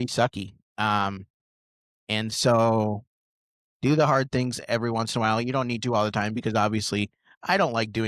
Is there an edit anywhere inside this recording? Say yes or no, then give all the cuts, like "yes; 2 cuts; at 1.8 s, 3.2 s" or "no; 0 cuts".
no; 0 cuts